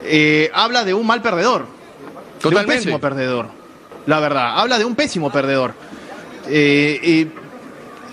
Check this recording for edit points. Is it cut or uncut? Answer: uncut